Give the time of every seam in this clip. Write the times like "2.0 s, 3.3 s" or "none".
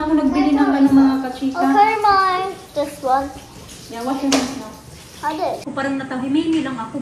5.6 s